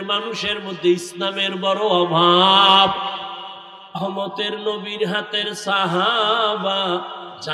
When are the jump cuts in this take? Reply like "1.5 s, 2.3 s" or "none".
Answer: 4.0 s